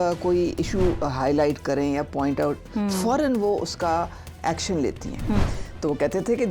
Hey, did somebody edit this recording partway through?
yes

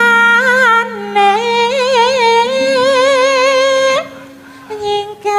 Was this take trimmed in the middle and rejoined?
no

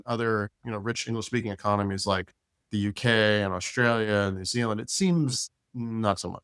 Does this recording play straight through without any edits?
yes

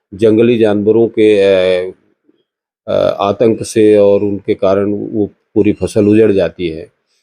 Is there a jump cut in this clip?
no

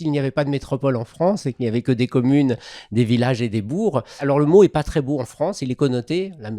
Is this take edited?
yes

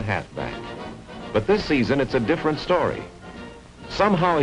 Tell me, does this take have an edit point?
no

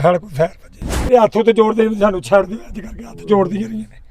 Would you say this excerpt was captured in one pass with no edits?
no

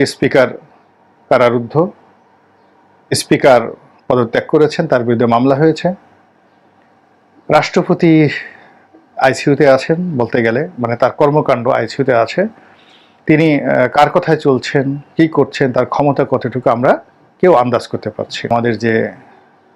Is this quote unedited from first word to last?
no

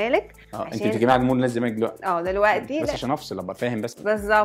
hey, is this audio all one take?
no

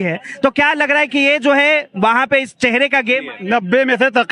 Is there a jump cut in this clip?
yes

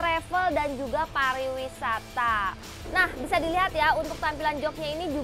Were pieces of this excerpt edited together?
yes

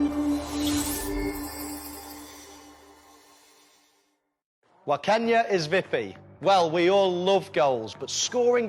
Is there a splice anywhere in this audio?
no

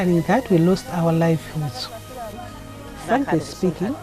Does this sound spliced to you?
yes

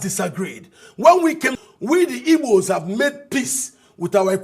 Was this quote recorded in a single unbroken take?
no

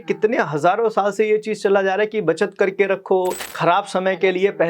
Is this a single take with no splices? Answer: no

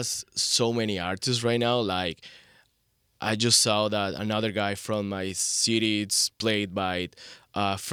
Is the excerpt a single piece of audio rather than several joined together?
yes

